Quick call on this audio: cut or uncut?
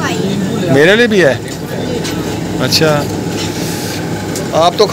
uncut